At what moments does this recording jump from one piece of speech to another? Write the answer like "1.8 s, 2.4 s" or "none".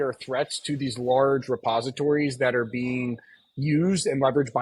none